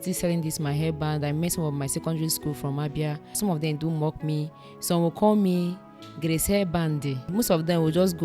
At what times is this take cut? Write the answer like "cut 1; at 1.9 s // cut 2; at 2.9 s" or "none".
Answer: cut 1; at 3.4 s // cut 2; at 7.3 s